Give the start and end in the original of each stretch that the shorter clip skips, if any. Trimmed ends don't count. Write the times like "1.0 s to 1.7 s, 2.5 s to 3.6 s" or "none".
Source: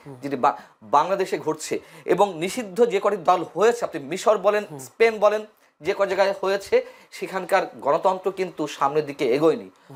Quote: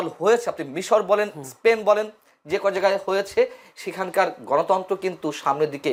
none